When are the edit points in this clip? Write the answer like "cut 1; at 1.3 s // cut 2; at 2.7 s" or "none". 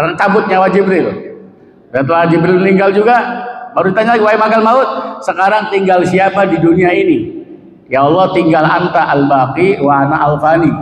none